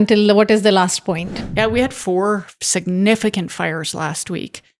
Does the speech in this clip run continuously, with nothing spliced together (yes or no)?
no